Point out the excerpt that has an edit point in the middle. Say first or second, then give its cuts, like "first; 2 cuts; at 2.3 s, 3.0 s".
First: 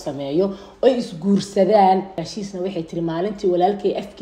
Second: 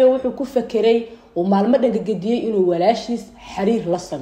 first; 1 cut; at 2.3 s